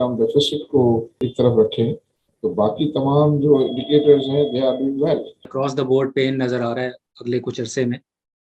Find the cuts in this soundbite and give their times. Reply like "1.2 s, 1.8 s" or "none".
1.2 s, 5.5 s